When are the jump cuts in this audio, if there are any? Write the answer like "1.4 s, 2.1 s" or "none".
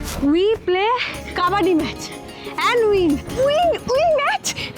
3.3 s